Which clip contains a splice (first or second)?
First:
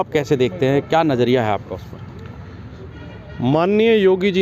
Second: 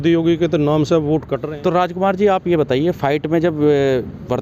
second